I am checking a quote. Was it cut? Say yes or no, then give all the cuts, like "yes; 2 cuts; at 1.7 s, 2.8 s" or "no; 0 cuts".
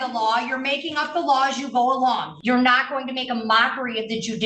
yes; 1 cut; at 2.3 s